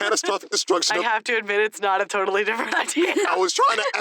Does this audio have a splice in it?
yes; 2 cuts; at 1.1 s, 3.0 s

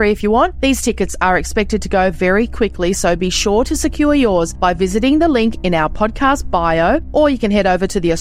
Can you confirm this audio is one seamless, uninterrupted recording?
yes; 0 cuts

